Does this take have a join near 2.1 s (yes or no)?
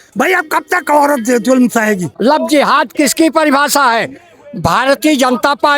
yes